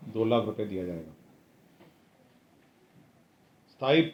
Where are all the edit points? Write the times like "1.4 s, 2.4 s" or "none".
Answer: none